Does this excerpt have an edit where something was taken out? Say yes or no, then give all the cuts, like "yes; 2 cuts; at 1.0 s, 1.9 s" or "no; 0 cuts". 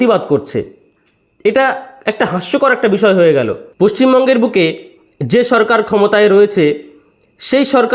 yes; 1 cut; at 3.6 s